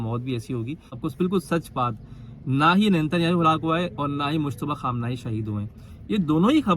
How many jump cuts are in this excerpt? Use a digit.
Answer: 1